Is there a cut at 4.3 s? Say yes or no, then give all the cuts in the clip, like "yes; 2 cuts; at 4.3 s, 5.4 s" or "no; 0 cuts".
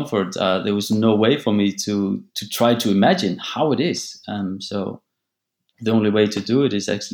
no; 0 cuts